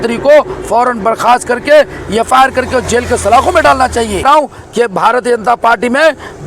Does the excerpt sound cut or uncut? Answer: cut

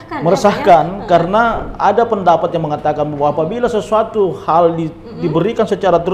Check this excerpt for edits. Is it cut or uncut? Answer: uncut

